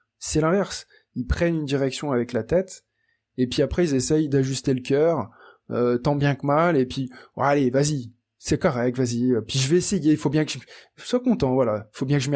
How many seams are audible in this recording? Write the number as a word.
zero